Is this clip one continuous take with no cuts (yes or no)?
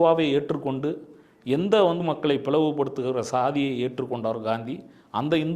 no